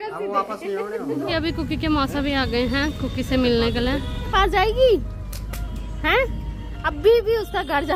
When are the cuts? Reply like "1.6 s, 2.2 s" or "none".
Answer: 1.3 s, 4.3 s

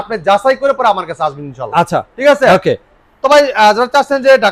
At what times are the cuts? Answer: none

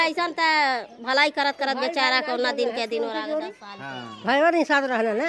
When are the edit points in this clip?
none

